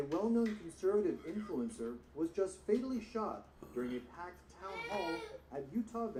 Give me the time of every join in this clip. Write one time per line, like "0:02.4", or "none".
none